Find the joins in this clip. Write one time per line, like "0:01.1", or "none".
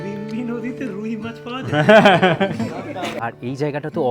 0:03.2